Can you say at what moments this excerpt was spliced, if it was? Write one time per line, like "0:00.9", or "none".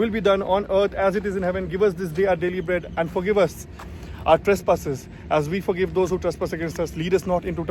none